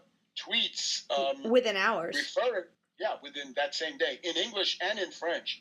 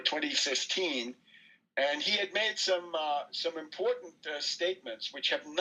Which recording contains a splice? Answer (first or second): first